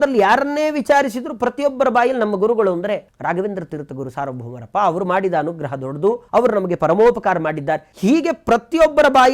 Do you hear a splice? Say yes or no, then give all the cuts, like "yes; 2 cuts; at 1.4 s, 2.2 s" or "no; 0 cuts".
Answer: yes; 3 cuts; at 3.1 s, 6.2 s, 7.9 s